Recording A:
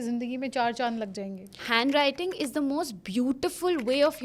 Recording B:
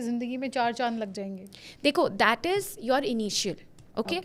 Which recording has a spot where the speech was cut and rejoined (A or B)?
A